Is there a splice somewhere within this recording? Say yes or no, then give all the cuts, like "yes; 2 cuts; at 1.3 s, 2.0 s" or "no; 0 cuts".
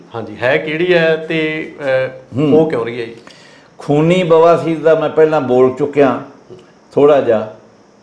no; 0 cuts